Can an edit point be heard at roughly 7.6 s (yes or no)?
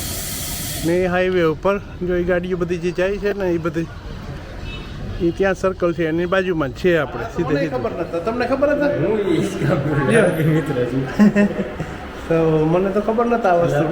yes